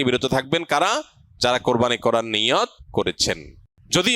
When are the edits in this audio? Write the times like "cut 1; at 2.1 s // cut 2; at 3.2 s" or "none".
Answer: cut 1; at 3.2 s

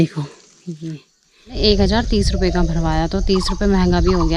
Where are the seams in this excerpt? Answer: cut 1; at 1.6 s

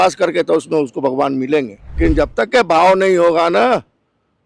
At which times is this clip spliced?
cut 1; at 2.0 s

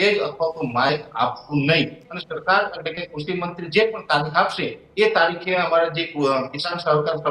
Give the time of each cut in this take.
cut 1; at 2.1 s

